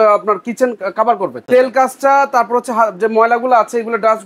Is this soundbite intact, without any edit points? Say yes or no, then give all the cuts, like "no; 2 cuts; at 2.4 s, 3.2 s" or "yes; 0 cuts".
no; 1 cut; at 1.5 s